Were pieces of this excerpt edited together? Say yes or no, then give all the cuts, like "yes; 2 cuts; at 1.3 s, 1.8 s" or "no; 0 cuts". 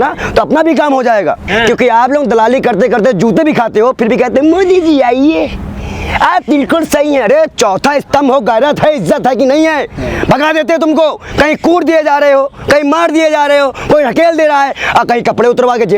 yes; 1 cut; at 1.5 s